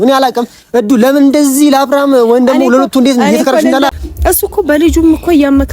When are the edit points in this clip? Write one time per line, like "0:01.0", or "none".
0:03.9